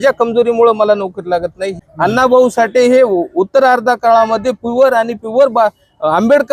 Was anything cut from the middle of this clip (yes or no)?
yes